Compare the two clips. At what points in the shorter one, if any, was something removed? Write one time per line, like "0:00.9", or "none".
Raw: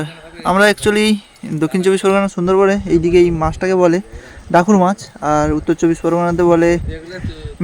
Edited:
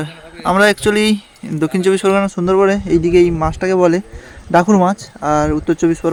none